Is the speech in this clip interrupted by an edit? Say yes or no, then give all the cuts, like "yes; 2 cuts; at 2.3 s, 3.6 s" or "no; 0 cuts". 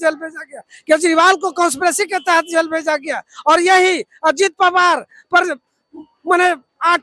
no; 0 cuts